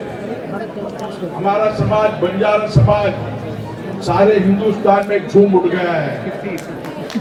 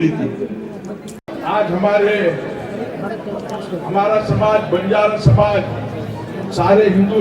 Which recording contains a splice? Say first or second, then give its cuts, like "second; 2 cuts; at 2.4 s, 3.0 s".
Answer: second; 1 cut; at 1.2 s